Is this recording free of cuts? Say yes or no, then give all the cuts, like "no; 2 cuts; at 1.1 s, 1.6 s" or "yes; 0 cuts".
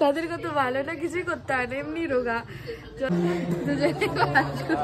no; 1 cut; at 3.1 s